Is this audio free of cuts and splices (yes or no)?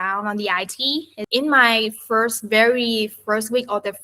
no